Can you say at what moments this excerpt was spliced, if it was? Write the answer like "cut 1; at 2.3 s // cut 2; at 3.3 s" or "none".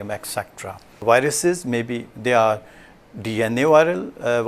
cut 1; at 1.0 s

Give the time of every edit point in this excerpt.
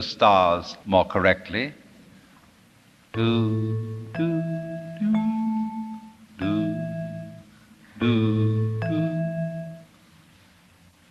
none

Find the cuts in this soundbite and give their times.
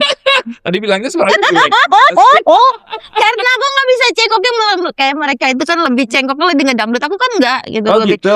none

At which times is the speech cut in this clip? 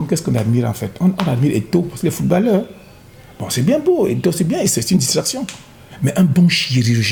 none

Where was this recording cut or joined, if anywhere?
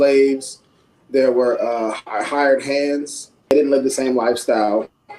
cut 1; at 3.5 s

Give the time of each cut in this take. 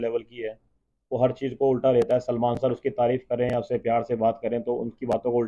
none

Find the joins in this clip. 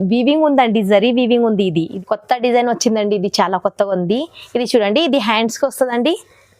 cut 1; at 1.9 s

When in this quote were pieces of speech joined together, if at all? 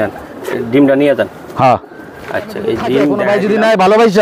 cut 1; at 3.2 s

